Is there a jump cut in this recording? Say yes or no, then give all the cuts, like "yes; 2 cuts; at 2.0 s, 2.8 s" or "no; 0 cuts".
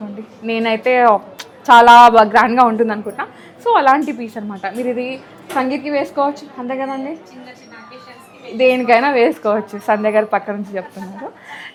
no; 0 cuts